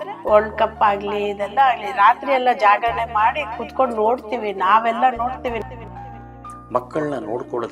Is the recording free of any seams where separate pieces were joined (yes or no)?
no